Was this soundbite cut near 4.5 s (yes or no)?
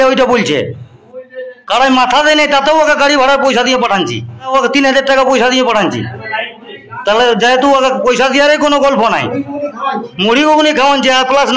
yes